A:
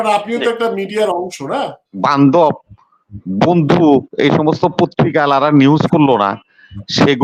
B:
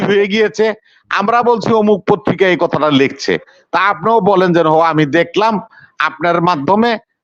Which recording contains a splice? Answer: A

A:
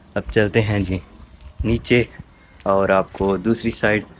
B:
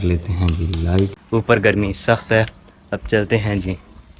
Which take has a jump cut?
B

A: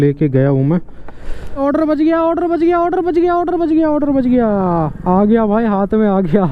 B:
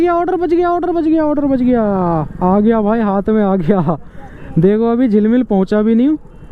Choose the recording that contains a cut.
A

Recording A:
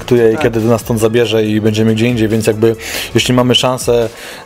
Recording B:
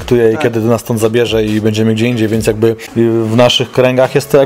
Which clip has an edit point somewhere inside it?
B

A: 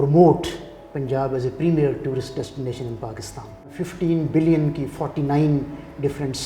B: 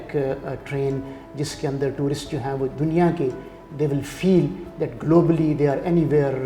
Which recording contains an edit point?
A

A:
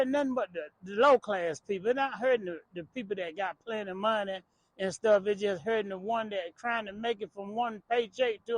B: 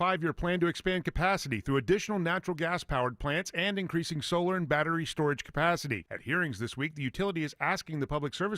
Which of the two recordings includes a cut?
A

